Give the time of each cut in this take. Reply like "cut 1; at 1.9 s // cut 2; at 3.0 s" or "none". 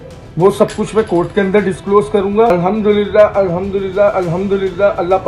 cut 1; at 2.5 s